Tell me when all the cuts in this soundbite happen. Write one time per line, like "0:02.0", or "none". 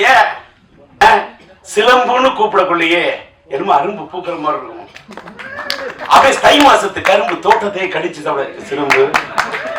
0:01.0